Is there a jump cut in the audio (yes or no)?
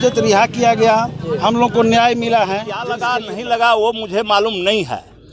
yes